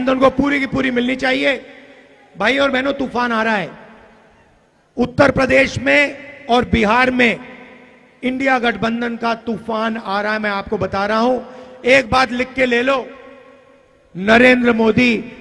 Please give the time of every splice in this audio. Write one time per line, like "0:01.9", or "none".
none